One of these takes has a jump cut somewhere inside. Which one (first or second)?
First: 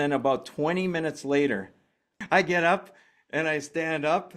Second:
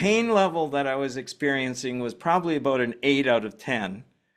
first